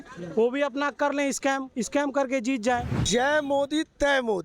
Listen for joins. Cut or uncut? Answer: cut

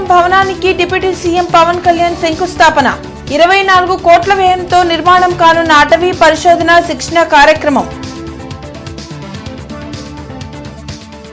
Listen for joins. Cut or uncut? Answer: uncut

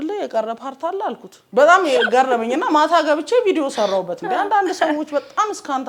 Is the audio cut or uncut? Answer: cut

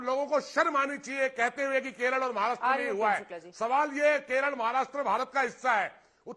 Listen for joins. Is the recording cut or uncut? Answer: uncut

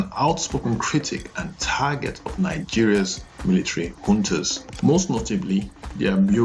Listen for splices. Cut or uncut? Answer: cut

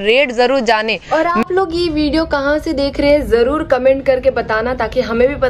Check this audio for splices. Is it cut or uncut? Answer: uncut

